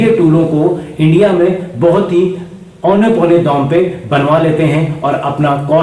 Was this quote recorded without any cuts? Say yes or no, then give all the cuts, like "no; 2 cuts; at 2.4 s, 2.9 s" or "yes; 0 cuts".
yes; 0 cuts